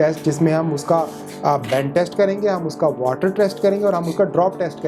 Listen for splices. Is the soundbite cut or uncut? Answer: uncut